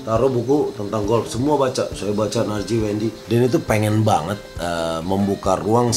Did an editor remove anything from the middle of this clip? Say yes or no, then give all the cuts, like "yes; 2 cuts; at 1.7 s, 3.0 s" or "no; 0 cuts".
yes; 1 cut; at 3.2 s